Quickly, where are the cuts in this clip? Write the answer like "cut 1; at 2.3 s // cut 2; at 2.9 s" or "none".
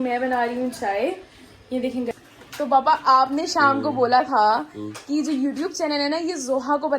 cut 1; at 2.1 s